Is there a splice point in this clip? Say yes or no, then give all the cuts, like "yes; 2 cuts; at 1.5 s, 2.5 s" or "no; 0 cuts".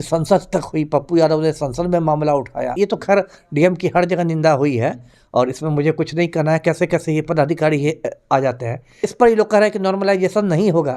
yes; 2 cuts; at 2.7 s, 9.1 s